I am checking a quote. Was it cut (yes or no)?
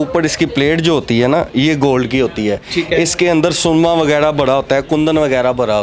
no